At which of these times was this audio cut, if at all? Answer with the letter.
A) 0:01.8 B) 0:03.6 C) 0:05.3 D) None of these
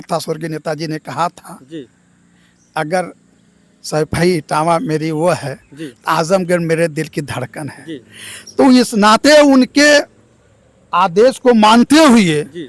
D